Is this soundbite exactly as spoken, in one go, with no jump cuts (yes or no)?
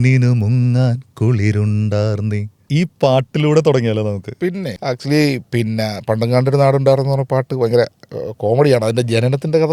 no